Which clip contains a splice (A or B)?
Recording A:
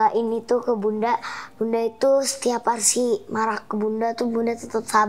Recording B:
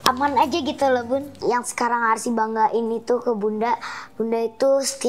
B